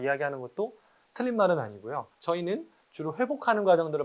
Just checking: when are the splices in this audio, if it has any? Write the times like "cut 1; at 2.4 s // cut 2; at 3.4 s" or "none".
cut 1; at 2.1 s